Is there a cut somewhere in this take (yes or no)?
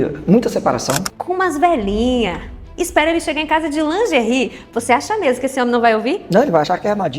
yes